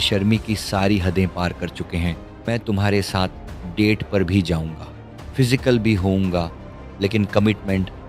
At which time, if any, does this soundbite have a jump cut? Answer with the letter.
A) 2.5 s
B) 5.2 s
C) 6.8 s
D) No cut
A